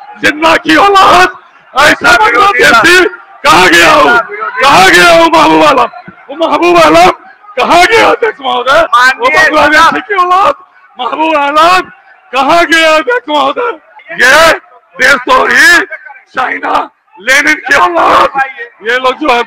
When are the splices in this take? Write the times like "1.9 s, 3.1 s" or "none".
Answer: none